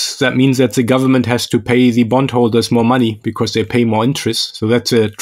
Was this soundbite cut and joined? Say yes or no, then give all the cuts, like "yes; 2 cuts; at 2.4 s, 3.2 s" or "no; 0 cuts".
no; 0 cuts